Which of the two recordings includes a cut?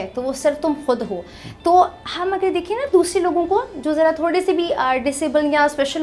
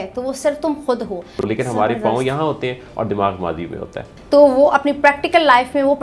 second; 2 cuts; at 1.5 s, 4.1 s

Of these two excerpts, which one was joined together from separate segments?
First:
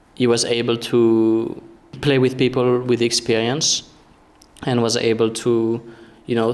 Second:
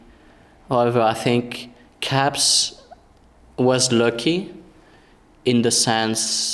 first; 1 cut; at 1.9 s

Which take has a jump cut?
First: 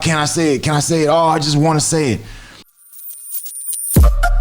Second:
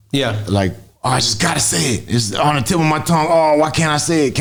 first; 1 cut; at 2.6 s

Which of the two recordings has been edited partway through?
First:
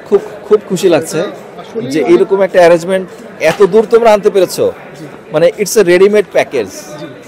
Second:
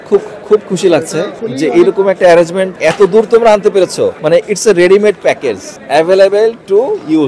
second; 4 cuts; at 1.4 s, 2.7 s, 4.2 s, 5.7 s

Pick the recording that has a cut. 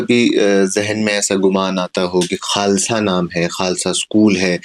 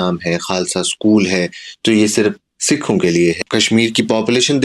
second; 1 cut; at 3.4 s

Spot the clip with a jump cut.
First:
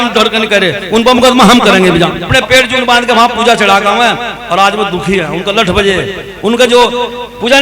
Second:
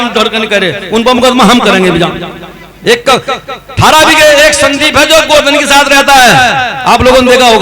first; 1 cut; at 2.3 s

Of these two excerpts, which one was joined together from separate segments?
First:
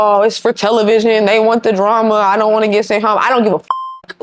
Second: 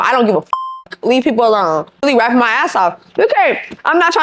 second; 1 cut; at 2.0 s

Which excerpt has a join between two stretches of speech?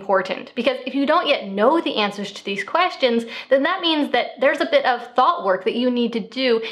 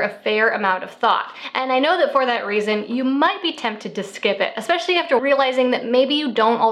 second; 1 cut; at 5.2 s

